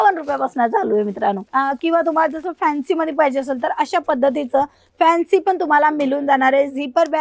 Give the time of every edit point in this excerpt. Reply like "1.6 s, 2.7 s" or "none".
1.4 s